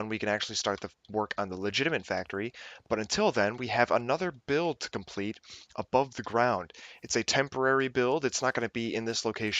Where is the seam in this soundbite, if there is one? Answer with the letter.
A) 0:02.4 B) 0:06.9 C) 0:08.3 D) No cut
A